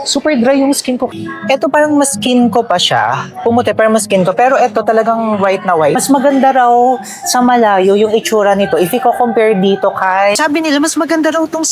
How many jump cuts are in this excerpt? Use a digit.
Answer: 3